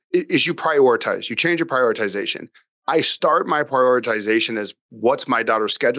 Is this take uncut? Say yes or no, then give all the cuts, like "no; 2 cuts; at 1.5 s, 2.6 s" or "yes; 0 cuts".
yes; 0 cuts